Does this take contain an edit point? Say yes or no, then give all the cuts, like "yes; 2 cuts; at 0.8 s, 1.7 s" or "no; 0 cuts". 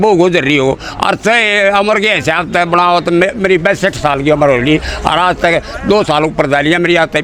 no; 0 cuts